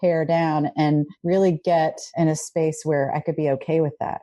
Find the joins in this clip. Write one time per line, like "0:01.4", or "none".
0:01.2
0:02.0

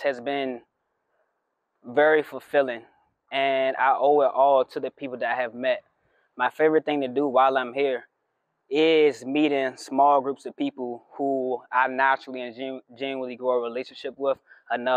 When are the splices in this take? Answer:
none

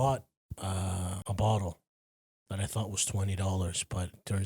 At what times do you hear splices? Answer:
0:01.2

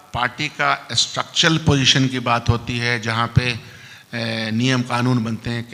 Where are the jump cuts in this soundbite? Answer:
none

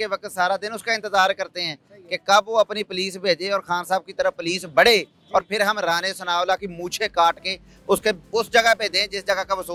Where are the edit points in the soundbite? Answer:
none

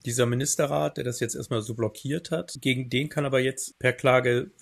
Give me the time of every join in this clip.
0:02.5

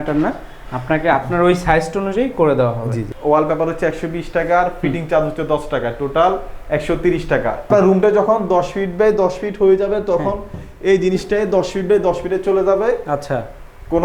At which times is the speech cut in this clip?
0:03.0
0:07.7

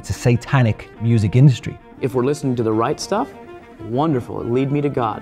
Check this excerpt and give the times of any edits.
0:01.7

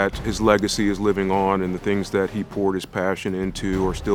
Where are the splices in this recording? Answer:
none

